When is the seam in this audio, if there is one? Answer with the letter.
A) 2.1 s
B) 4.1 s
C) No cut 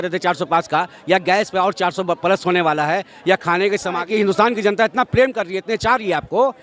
B